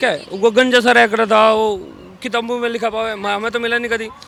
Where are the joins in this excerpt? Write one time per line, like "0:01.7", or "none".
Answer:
none